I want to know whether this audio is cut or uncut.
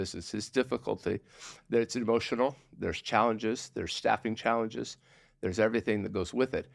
uncut